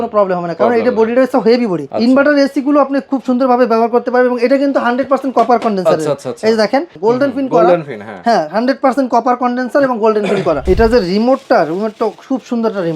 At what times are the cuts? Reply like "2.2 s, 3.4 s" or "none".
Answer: 1.8 s, 6.9 s, 10.6 s